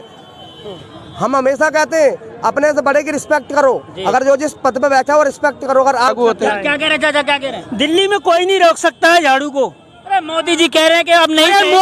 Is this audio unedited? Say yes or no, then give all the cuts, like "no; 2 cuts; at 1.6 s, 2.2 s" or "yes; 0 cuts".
no; 1 cut; at 6.1 s